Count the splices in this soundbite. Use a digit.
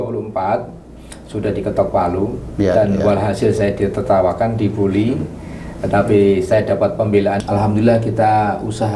1